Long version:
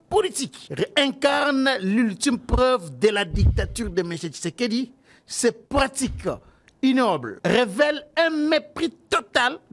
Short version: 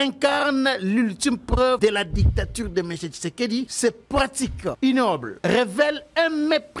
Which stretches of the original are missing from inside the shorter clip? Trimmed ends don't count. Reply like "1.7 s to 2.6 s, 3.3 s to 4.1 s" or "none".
2.8 s to 3.0 s, 4.9 s to 5.3 s, 6.4 s to 6.8 s